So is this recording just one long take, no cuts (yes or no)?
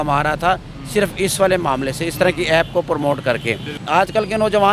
no